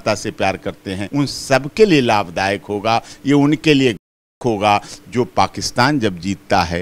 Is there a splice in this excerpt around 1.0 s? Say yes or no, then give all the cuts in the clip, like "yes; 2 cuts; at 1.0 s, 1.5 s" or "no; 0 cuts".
yes; 1 cut; at 1.0 s